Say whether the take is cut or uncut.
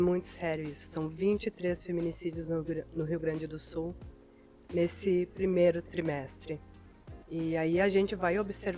cut